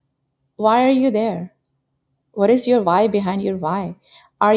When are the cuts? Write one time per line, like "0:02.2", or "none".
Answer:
none